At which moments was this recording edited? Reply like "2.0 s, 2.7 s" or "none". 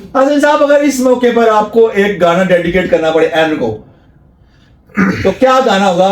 none